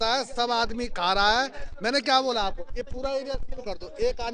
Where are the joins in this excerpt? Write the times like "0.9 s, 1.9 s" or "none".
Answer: none